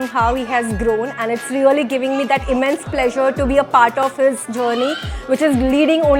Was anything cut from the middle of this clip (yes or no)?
no